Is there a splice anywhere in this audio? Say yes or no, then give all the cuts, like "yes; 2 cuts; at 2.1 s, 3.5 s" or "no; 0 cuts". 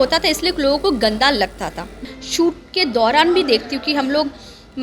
yes; 1 cut; at 2.1 s